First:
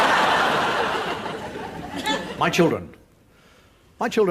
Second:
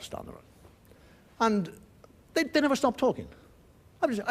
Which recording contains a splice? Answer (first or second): second